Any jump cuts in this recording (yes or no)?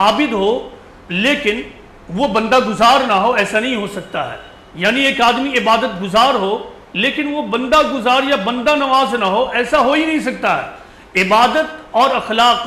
no